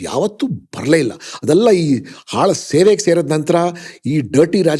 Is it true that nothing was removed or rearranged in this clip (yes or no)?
yes